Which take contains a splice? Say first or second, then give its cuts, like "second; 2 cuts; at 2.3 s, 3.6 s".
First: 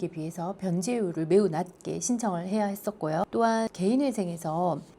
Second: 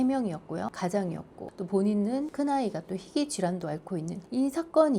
second; 4 cuts; at 0.7 s, 1.4 s, 2.3 s, 4.2 s